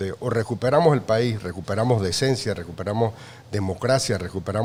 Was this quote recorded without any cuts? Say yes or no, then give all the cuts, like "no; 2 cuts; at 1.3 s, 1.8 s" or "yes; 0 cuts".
yes; 0 cuts